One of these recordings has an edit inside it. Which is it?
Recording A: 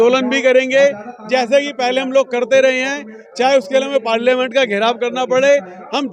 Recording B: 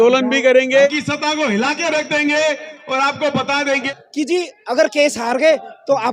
B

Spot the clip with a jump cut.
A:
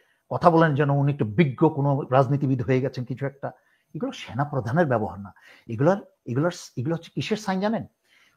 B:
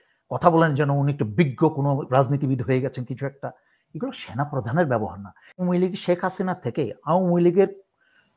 B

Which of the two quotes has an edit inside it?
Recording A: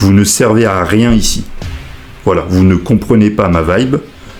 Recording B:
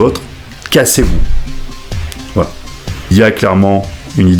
B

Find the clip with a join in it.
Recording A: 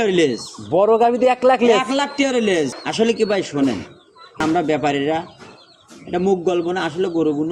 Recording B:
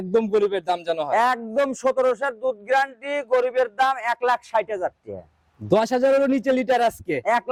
A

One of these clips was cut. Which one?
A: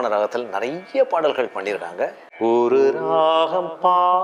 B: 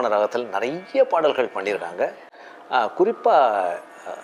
A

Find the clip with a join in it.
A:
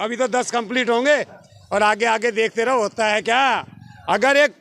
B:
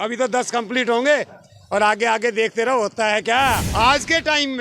B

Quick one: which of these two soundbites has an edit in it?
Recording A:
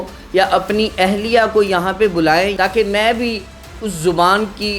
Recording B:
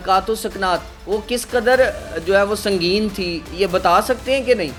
A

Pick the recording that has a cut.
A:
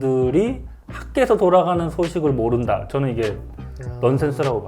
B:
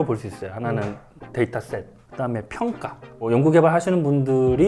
B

